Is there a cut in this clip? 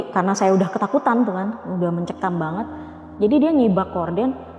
yes; 1 cut; at 3.0 s

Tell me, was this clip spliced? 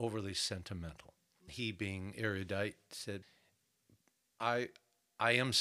yes; 2 cuts; at 1.5 s, 3.2 s

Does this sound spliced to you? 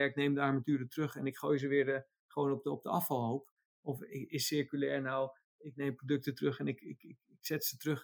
no; 0 cuts

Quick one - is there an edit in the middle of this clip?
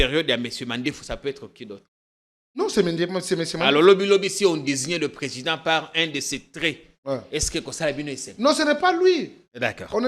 no; 0 cuts

